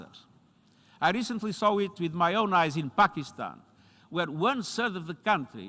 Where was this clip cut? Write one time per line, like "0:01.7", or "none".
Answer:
none